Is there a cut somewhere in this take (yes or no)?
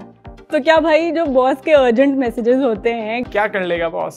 yes